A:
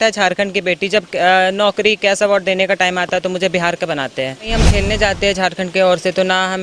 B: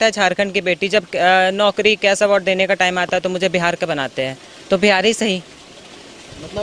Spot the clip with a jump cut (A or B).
A